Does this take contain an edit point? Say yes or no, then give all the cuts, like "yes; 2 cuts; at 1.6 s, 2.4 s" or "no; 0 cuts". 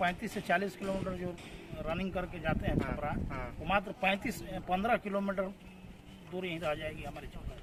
no; 0 cuts